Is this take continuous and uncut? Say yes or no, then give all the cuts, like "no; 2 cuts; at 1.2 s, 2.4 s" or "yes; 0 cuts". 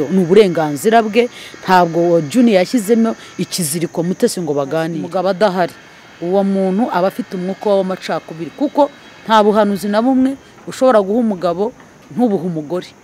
no; 1 cut; at 5.0 s